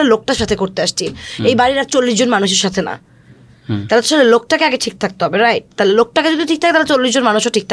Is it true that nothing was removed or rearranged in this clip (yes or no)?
yes